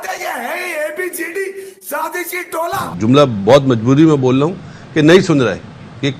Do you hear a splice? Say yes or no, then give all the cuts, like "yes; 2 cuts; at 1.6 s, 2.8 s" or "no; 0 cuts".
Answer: yes; 1 cut; at 2.8 s